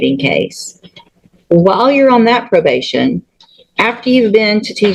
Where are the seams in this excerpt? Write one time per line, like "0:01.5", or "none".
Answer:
none

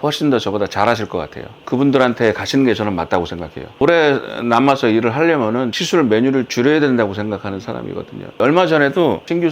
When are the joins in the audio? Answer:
0:03.8
0:05.8

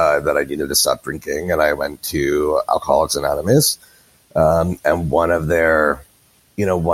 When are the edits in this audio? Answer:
none

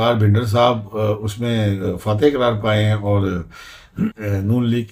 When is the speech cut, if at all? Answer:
none

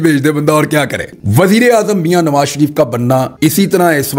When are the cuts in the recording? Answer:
0:01.1

